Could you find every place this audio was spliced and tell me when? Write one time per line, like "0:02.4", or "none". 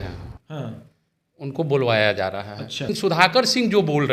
0:02.9